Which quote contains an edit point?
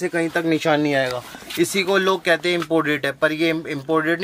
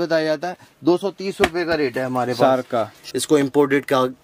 second; 1 cut; at 3.0 s

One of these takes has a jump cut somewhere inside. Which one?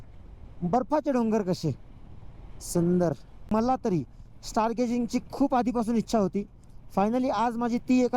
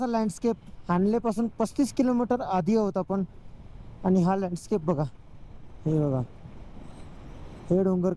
first; 1 cut; at 3.5 s

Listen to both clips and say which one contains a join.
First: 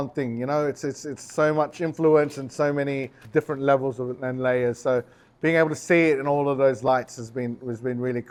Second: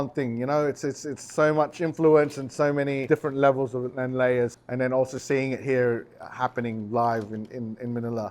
second; 2 cuts; at 3.0 s, 4.5 s

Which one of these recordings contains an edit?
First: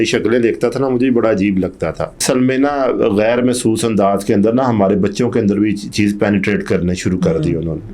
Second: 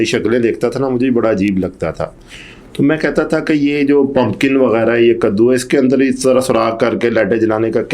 first; 1 cut; at 2.2 s

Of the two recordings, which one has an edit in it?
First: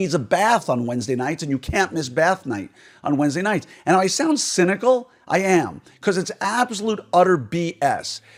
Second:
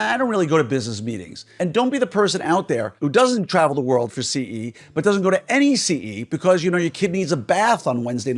second; 2 cuts; at 1.5 s, 2.9 s

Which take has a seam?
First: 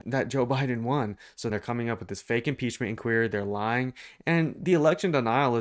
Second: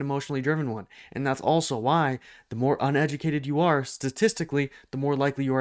first; 1 cut; at 1.5 s

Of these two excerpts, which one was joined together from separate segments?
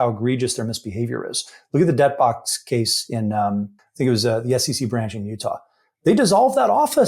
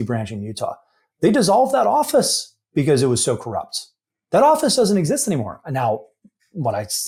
first; 1 cut; at 3.8 s

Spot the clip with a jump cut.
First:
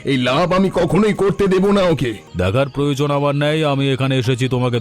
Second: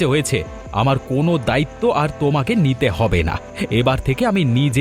first; 1 cut; at 2.2 s

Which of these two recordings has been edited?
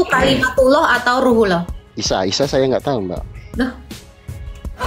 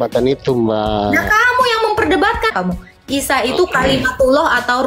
second; 1 cut; at 2.5 s

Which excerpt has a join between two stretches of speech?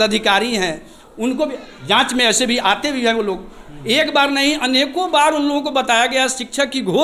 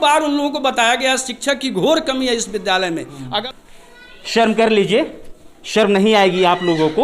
second; 1 cut; at 3.4 s

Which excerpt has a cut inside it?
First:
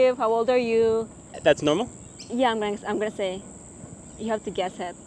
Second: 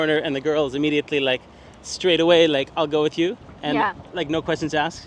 first; 1 cut; at 1.2 s

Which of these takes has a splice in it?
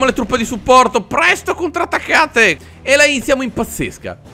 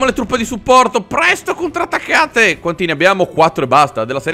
first; 1 cut; at 2.6 s

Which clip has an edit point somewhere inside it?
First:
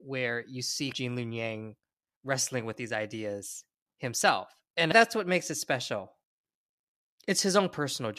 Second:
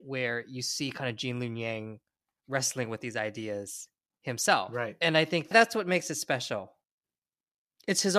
first; 2 cuts; at 0.9 s, 4.9 s

